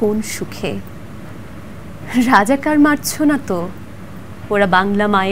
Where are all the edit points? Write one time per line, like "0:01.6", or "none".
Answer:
none